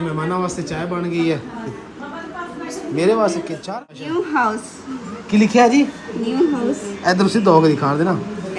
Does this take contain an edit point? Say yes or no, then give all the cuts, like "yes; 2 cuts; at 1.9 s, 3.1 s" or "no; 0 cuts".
yes; 1 cut; at 3.7 s